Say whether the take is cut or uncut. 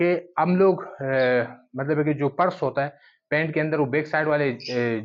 uncut